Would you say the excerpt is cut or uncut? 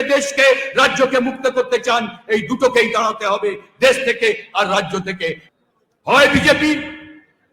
cut